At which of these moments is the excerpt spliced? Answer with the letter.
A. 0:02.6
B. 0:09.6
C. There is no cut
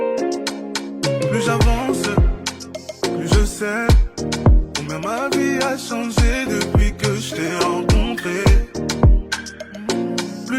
C